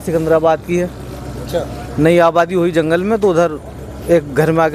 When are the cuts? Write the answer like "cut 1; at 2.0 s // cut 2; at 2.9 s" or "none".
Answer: none